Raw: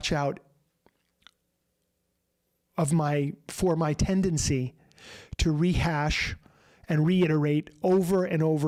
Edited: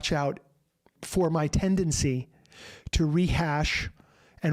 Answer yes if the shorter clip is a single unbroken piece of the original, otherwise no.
no